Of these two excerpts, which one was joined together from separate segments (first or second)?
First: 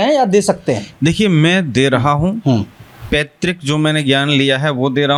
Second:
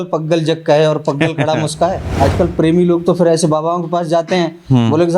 second